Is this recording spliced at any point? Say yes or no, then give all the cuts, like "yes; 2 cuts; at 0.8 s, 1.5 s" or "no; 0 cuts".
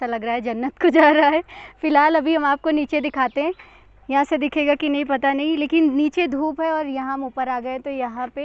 no; 0 cuts